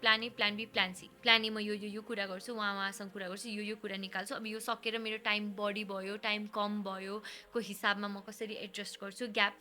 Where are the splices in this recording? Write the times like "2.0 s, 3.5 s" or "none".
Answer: 1.1 s

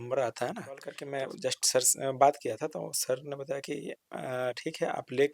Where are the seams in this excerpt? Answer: 1.0 s

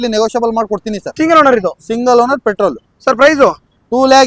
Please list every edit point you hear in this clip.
1.0 s

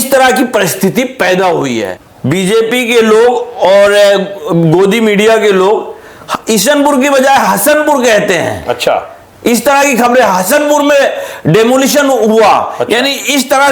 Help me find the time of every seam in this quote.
2.0 s

